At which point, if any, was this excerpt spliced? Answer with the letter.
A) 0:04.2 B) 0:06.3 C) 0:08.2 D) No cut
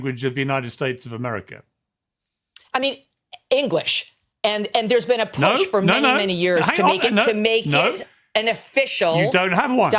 D